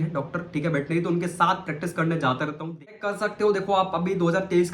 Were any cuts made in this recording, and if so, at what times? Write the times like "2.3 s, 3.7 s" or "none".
2.9 s